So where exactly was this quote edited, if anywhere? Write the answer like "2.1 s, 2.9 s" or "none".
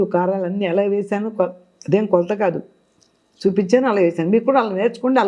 none